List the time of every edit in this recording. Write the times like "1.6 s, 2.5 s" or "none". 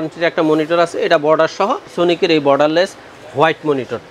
1.9 s

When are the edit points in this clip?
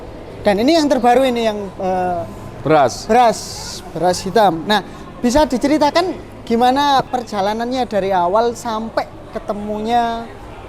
7.1 s

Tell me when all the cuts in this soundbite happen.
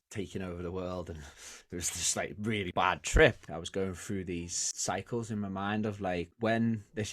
2.7 s, 3.4 s, 4.6 s

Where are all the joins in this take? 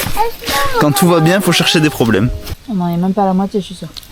2.5 s

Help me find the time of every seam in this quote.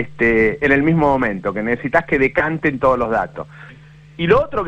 3.7 s

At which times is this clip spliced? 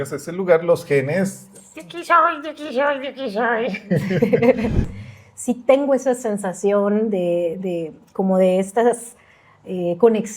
4.9 s

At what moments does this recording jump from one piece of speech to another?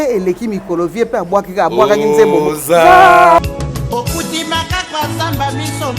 3.4 s

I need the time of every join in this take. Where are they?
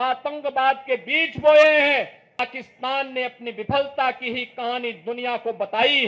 2.4 s

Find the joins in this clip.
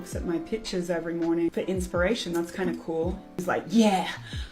1.5 s, 3.4 s

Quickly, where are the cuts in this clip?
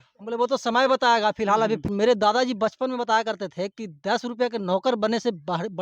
1.9 s

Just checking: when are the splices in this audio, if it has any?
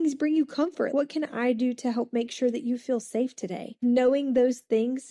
0.9 s, 3.8 s

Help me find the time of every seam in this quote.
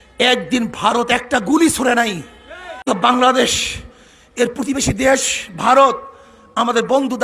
2.8 s

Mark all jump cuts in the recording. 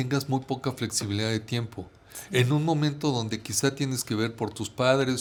none

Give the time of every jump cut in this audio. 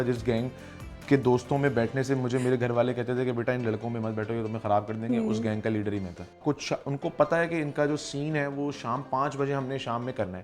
6.3 s

